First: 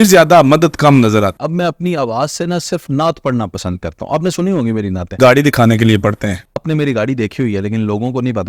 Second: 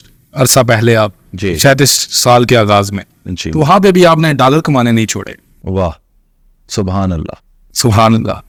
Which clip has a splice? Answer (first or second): first